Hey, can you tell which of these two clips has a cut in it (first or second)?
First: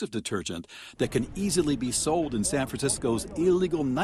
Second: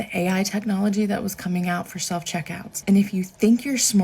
second